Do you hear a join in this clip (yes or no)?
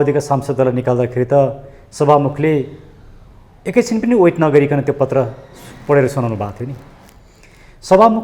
no